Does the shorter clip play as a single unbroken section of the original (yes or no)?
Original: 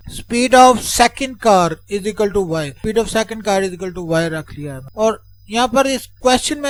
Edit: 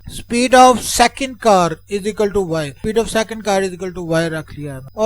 yes